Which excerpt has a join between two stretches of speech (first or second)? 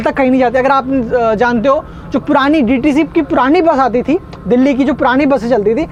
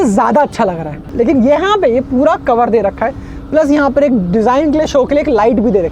second